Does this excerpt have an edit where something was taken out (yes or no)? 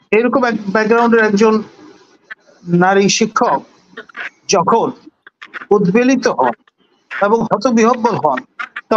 no